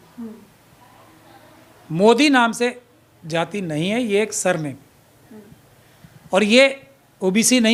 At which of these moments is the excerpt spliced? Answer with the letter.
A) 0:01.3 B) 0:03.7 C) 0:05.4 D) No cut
D